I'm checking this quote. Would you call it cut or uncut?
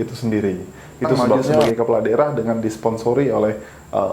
cut